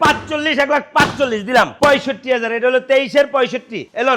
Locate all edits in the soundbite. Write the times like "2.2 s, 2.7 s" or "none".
1.8 s